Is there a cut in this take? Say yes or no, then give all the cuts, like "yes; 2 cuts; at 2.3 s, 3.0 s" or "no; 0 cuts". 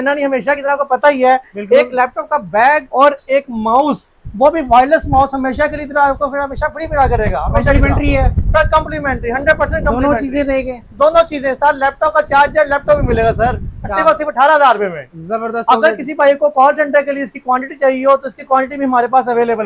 no; 0 cuts